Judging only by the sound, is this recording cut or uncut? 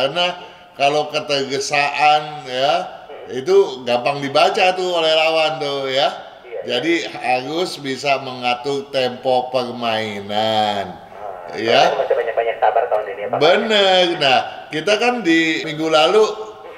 uncut